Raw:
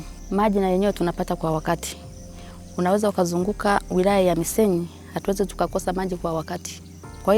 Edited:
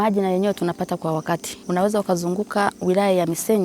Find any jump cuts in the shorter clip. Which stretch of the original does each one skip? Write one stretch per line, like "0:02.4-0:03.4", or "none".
0:01.9-0:02.6